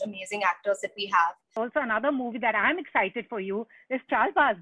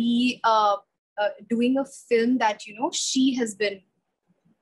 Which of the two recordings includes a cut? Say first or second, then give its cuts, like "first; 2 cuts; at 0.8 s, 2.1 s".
first; 1 cut; at 1.5 s